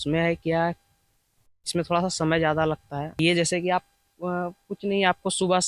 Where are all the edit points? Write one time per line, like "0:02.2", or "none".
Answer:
0:03.2